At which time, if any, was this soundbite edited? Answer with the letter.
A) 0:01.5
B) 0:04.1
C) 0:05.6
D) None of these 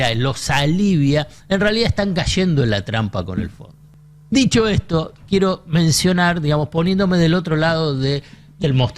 D